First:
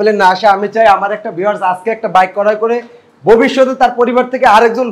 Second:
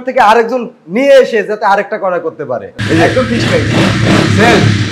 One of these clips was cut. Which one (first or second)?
second